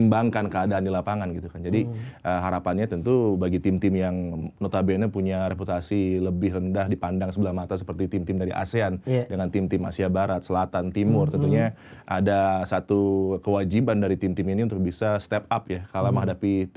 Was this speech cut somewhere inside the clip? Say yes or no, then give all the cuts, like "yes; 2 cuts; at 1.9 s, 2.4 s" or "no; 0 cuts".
no; 0 cuts